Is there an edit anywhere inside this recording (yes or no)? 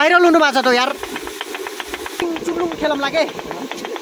yes